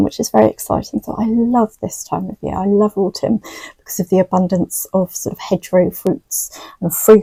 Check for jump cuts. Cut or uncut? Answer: uncut